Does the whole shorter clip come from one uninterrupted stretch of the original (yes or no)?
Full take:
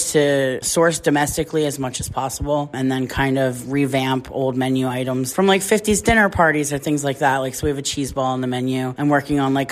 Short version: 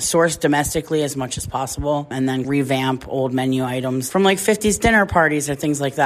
no